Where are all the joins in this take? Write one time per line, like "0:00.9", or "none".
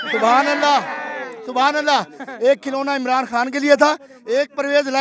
none